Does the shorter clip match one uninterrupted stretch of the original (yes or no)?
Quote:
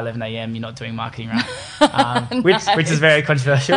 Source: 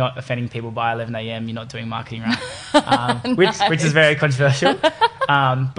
yes